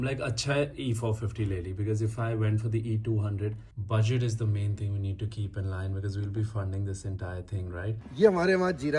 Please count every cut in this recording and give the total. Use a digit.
2